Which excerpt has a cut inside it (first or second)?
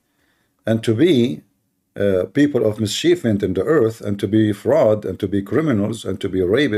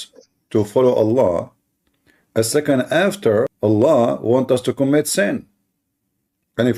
second